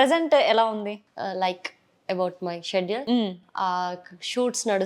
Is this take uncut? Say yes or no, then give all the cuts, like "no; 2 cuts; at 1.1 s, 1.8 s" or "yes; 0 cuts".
yes; 0 cuts